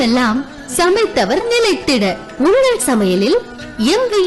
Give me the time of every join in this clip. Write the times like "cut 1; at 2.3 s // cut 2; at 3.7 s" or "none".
none